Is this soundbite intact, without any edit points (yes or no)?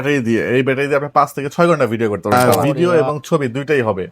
no